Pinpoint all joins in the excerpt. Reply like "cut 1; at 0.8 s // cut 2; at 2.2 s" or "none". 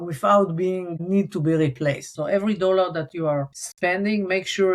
cut 1; at 2.1 s // cut 2; at 3.6 s